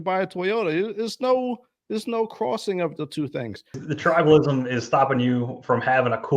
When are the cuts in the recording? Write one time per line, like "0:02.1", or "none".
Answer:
0:03.7

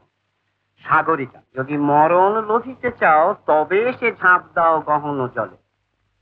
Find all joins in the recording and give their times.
0:01.4

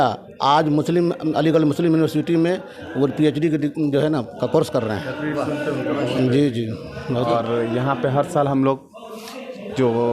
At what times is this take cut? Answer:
0:07.3

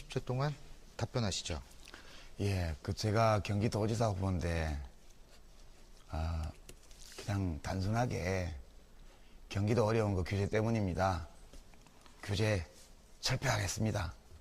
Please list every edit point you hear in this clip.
0:03.2

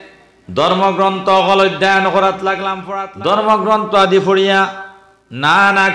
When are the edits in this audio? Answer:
0:02.7

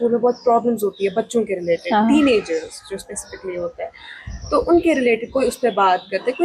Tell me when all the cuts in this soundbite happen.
none

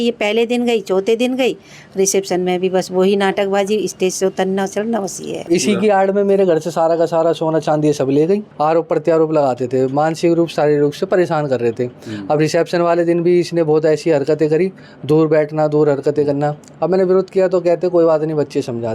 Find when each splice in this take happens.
0:05.4
0:08.5

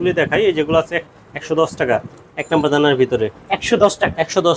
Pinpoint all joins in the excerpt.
none

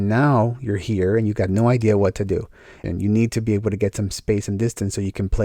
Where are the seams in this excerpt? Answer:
0:02.8

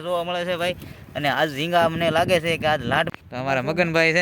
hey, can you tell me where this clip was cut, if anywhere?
0:03.1

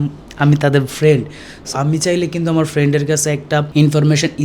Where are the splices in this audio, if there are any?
0:01.6

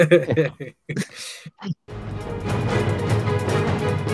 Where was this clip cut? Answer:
0:01.8

